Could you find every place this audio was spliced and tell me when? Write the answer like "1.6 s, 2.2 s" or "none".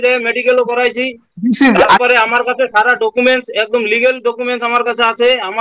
none